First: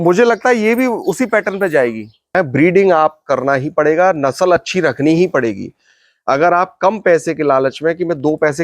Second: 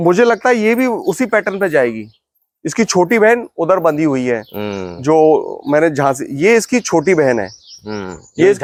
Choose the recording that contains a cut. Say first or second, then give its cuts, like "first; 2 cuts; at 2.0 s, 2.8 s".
first; 1 cut; at 2.3 s